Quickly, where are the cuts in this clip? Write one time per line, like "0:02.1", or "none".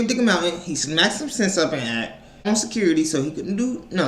0:02.5

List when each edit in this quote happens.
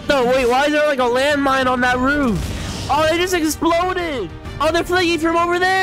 0:04.6

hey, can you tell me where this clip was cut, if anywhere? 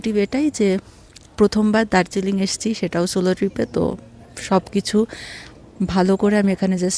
none

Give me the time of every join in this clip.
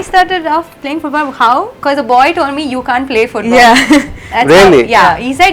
0:01.7

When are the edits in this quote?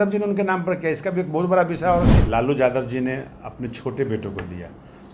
0:02.2

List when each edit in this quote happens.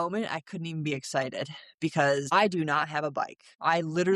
0:02.2

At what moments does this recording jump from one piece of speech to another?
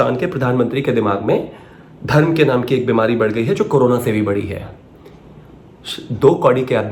none

